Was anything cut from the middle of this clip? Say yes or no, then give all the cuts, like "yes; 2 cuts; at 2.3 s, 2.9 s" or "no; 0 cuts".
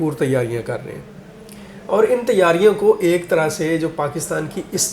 no; 0 cuts